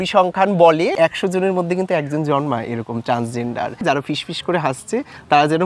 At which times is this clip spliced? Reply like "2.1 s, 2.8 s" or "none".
1.0 s, 3.8 s